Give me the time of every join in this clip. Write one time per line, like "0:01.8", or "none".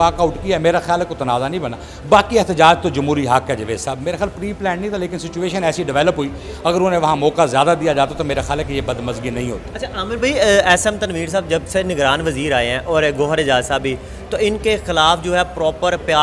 none